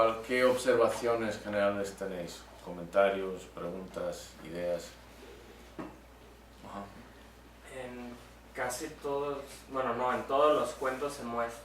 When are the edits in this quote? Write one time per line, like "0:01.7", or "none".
0:08.0

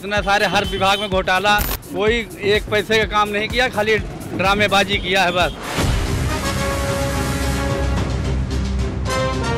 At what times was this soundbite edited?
0:01.8
0:05.6

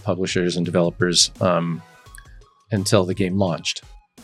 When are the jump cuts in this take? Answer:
none

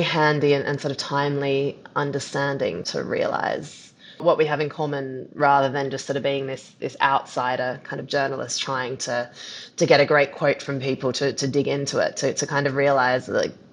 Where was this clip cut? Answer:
0:02.8
0:04.2

